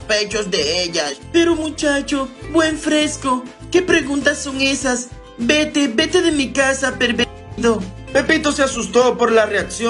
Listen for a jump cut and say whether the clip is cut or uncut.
uncut